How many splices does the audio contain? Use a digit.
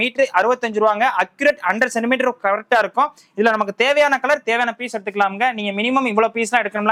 0